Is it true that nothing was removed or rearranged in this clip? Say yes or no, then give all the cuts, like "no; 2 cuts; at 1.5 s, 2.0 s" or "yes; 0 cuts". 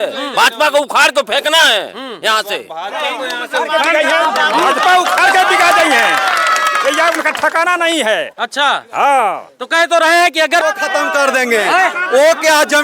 no; 1 cut; at 10.6 s